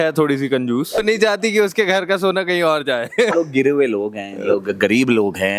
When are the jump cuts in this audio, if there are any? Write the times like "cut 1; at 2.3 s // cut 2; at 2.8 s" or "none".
cut 1; at 1.0 s // cut 2; at 3.3 s